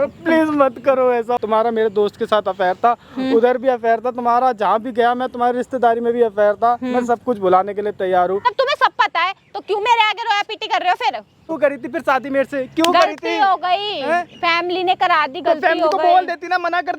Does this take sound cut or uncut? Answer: cut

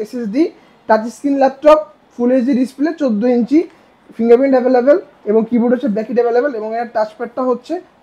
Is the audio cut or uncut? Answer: uncut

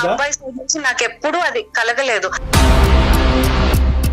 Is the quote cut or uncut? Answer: cut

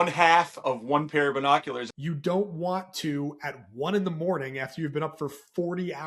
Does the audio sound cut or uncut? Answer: cut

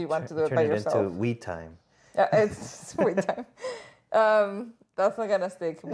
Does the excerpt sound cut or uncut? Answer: uncut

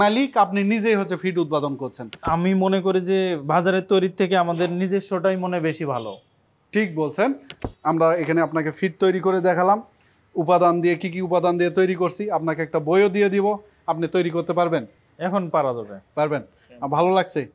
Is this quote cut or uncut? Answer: cut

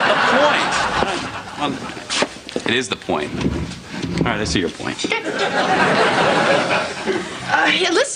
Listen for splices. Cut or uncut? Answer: uncut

